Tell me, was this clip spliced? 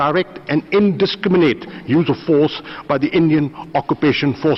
no; 0 cuts

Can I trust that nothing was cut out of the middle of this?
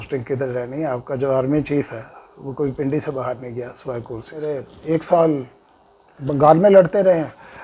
no; 1 cut; at 4.7 s

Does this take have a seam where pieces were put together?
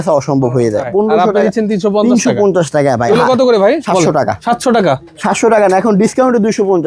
yes; 3 cuts; at 0.9 s, 3.1 s, 4.1 s

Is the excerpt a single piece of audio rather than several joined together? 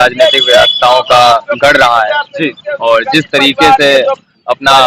yes; 0 cuts

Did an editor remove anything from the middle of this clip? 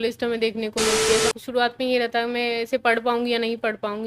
yes; 1 cut; at 1.2 s

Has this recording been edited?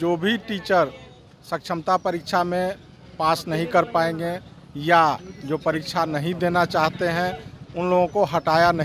no; 0 cuts

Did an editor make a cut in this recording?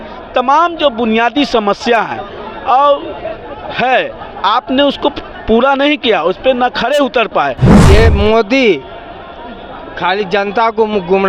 yes; 1 cut; at 7.7 s

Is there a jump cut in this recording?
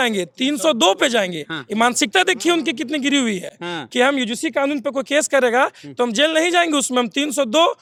no; 0 cuts

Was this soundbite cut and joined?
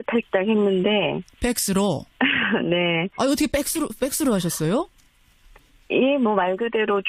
yes; 1 cut; at 4.9 s

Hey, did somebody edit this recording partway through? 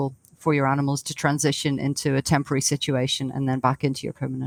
no; 0 cuts

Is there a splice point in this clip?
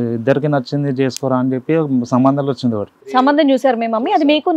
yes; 1 cut; at 2.9 s

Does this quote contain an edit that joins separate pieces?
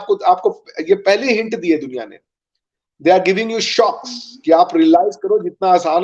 no; 0 cuts

